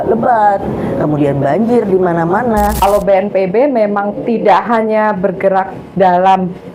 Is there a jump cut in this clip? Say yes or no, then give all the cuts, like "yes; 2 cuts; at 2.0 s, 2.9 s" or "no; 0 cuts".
yes; 1 cut; at 2.7 s